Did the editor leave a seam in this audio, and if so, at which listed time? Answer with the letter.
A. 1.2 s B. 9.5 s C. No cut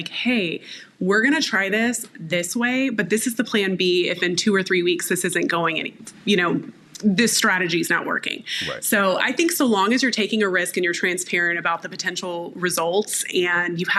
C